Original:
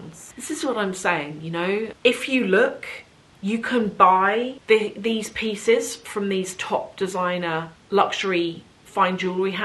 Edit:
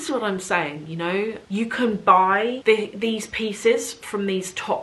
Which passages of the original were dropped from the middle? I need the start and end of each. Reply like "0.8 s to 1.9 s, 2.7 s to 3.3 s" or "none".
1.9 s to 3.3 s, 4.5 s to 4.6 s